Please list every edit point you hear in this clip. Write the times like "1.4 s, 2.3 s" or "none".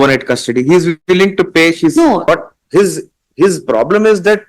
2.3 s